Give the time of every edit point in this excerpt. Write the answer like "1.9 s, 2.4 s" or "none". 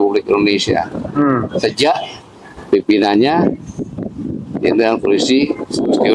none